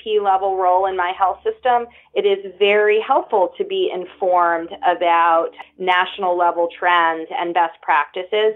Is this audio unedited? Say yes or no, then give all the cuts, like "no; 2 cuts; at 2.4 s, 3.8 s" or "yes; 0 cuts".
no; 1 cut; at 5.6 s